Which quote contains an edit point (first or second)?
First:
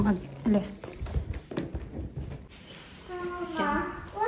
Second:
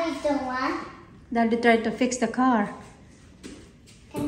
first